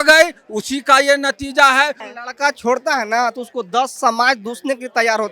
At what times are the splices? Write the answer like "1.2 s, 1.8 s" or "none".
2.1 s